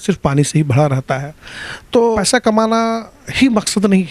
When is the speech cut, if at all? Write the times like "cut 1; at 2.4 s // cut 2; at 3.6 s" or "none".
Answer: cut 1; at 2.2 s